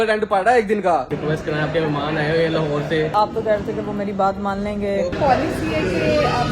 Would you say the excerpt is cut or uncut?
cut